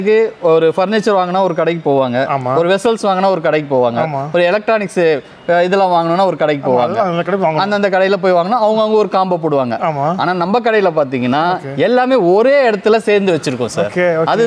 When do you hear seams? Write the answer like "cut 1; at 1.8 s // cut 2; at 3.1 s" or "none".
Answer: none

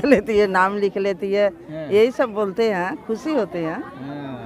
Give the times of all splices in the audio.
none

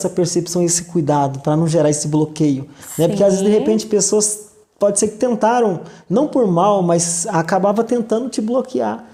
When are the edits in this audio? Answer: none

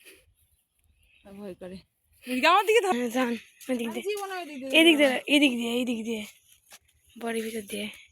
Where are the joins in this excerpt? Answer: cut 1; at 2.9 s

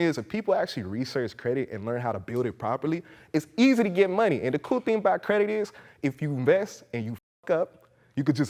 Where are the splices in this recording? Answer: none

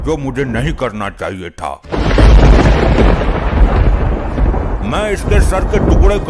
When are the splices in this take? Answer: cut 1; at 1.8 s

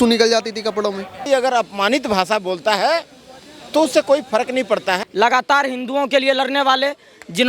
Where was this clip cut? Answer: cut 1; at 1.3 s // cut 2; at 5.0 s

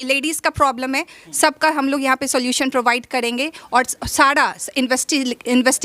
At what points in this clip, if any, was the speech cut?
none

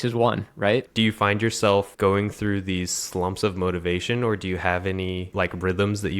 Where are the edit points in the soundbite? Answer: cut 1; at 0.9 s // cut 2; at 1.9 s // cut 3; at 5.3 s

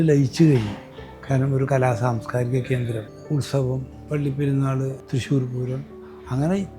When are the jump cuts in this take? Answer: cut 1; at 3.1 s // cut 2; at 4.0 s // cut 3; at 5.0 s

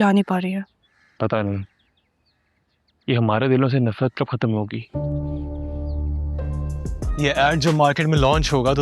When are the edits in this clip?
cut 1; at 7.1 s

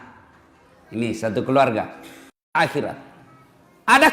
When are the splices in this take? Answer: cut 1; at 2.6 s

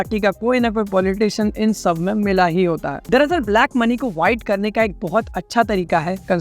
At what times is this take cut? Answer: cut 1; at 3.0 s

